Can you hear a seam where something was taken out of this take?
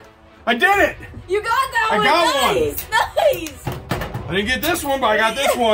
no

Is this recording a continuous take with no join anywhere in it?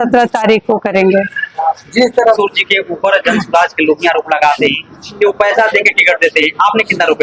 no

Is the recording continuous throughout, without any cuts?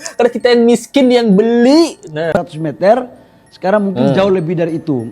no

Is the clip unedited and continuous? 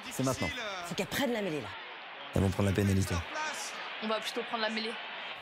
yes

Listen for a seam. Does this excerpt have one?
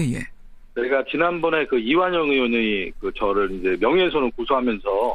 yes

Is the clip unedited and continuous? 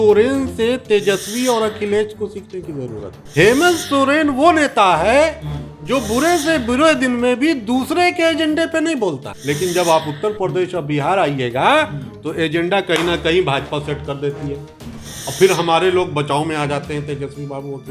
no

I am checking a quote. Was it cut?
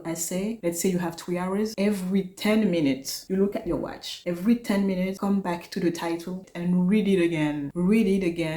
yes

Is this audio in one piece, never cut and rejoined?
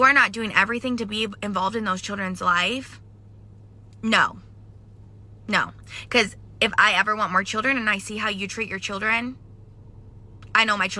no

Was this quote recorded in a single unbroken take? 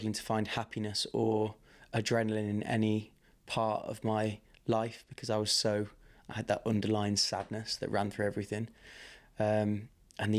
yes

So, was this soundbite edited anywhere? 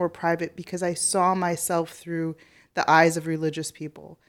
no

